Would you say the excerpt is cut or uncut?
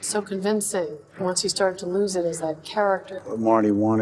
cut